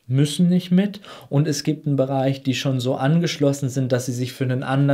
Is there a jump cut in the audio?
no; 0 cuts

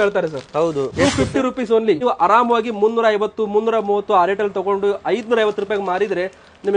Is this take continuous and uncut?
no; 2 cuts; at 0.9 s, 2.0 s

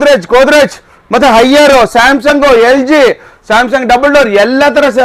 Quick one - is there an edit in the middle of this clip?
no; 0 cuts

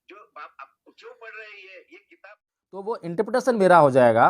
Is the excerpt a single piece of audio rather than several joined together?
no; 1 cut; at 2.9 s

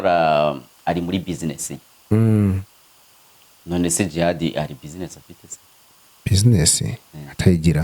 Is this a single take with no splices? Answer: yes; 0 cuts

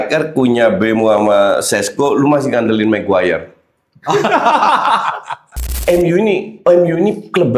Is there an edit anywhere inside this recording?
yes; 1 cut; at 5.7 s

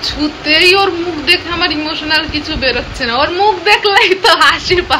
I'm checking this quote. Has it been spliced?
no; 0 cuts

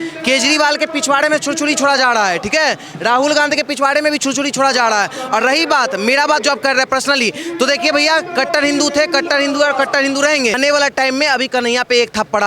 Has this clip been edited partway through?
yes; 1 cut; at 10.6 s

